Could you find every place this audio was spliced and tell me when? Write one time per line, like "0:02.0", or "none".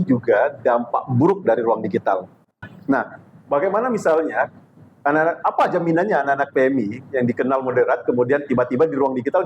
0:02.6